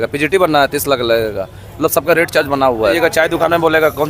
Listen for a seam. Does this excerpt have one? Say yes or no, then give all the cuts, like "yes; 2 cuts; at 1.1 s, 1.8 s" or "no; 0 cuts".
yes; 1 cut; at 3.0 s